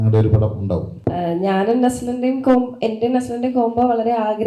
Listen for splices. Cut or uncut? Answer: cut